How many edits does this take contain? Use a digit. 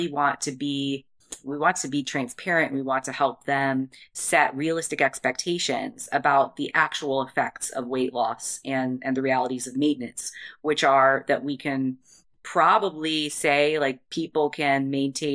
0